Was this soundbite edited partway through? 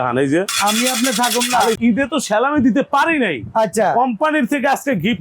yes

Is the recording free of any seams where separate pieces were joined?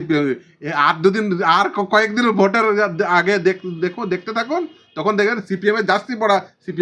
yes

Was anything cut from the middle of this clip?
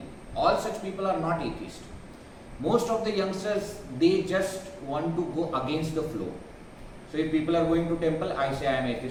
no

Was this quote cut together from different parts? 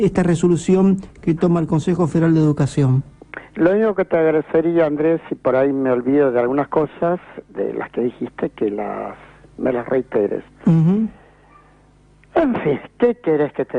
yes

